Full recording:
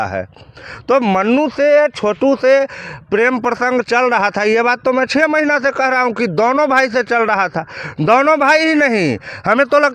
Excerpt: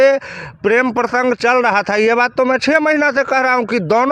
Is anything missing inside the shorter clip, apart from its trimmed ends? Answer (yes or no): no